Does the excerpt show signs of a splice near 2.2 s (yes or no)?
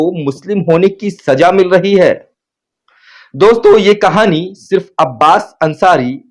no